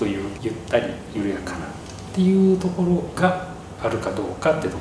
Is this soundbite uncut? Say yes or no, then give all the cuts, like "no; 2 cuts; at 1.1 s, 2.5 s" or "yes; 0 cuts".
yes; 0 cuts